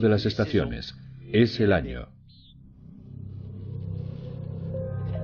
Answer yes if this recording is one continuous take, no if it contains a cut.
yes